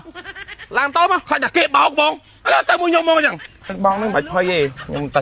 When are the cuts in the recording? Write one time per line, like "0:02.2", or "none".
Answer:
0:03.7

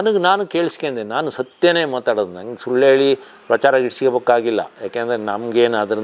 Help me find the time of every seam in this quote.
none

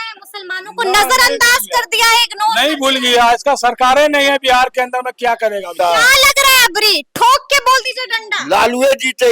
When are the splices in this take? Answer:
0:05.7

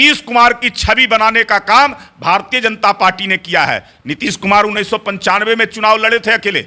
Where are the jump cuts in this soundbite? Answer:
none

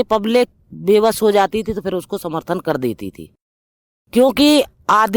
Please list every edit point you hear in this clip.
none

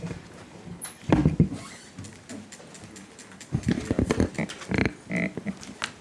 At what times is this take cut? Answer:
none

